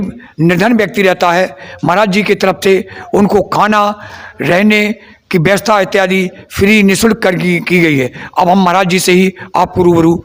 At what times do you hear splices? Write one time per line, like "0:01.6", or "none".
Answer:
none